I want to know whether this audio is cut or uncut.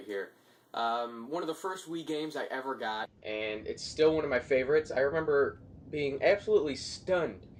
uncut